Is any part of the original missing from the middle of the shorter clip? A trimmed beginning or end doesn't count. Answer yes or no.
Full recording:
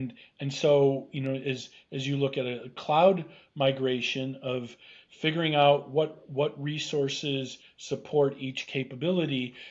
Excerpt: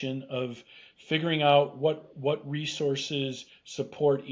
no